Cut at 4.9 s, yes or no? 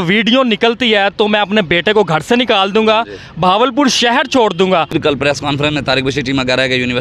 yes